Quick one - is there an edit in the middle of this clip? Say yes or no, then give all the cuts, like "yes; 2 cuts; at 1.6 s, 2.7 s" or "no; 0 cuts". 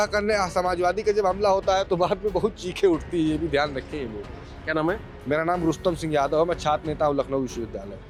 no; 0 cuts